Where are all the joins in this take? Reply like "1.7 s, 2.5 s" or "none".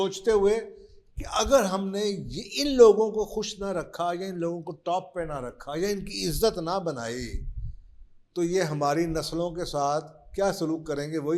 none